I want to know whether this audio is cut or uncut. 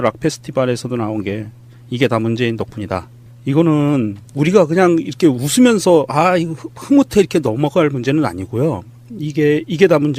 uncut